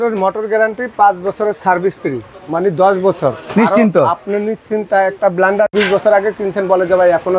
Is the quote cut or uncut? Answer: uncut